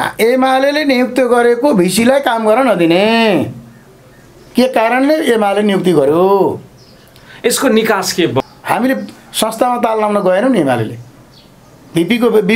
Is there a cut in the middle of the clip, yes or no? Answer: yes